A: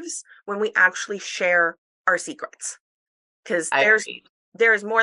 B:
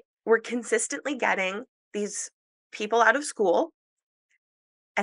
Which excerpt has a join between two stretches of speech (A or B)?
B